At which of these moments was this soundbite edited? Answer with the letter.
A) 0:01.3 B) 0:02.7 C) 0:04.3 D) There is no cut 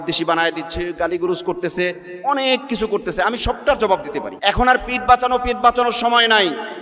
C